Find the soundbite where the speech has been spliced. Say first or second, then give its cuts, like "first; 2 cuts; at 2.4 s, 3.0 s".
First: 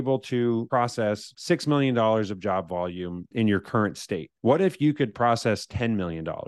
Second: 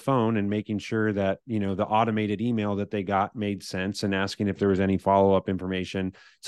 first; 3 cuts; at 0.9 s, 3.3 s, 4.3 s